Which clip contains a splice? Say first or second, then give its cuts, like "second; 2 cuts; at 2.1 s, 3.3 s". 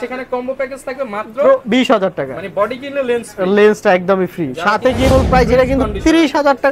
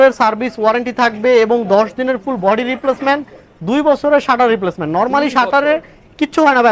first; 1 cut; at 5.1 s